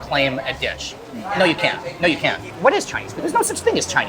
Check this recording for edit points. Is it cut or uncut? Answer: cut